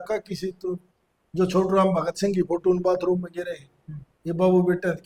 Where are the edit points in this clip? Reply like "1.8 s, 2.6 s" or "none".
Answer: none

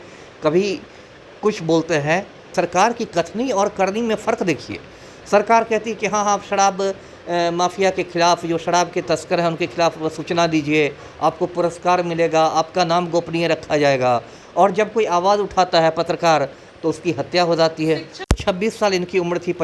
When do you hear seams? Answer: 2.5 s, 18.2 s

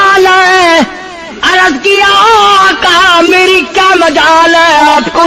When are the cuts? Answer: none

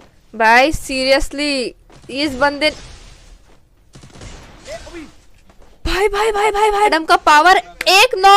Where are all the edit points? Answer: 6.9 s

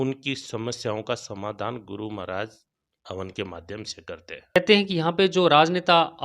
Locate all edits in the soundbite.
4.6 s

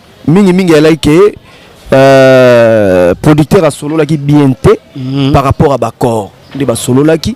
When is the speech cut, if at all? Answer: none

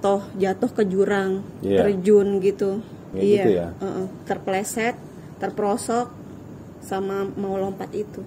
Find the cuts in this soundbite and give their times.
3.1 s

